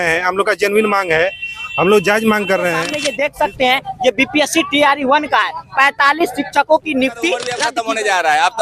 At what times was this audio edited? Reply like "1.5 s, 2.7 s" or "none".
3.0 s, 7.6 s